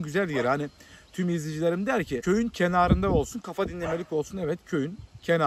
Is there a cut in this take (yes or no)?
yes